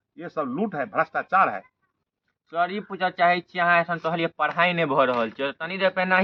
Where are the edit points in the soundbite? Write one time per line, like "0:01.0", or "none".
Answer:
none